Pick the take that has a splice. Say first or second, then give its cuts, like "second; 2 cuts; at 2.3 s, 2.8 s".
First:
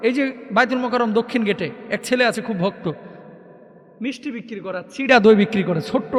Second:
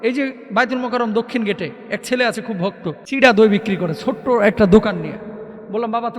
second; 1 cut; at 3.0 s